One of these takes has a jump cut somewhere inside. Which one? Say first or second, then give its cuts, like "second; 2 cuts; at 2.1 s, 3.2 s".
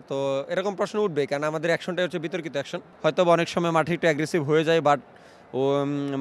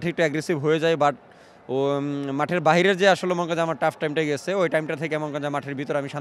first; 1 cut; at 2.8 s